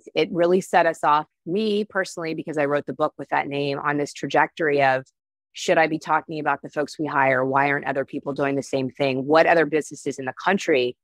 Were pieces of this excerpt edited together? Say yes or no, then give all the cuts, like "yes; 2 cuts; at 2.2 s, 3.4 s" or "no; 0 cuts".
no; 0 cuts